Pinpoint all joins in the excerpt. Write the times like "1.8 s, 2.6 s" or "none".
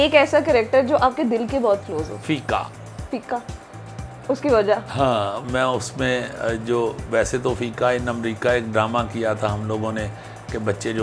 none